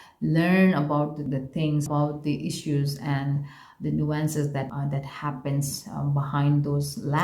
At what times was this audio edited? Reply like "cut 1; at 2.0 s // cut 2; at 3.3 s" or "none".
cut 1; at 1.8 s // cut 2; at 4.7 s